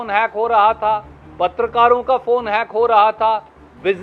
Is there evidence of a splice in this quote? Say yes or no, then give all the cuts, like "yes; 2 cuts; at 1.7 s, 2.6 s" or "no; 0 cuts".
no; 0 cuts